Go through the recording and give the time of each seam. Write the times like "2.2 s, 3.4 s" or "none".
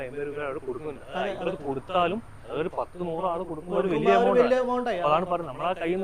none